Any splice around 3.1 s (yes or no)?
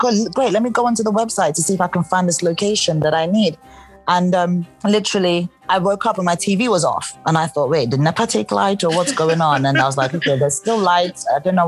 no